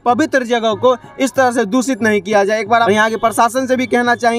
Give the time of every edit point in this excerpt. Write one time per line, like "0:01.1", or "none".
0:02.9